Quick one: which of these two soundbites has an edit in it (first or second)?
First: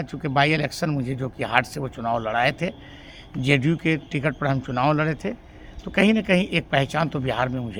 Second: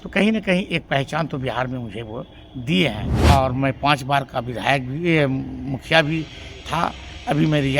second